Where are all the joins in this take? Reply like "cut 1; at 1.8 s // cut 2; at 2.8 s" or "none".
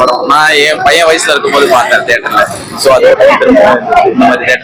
none